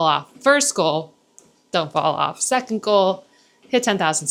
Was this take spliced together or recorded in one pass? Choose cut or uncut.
uncut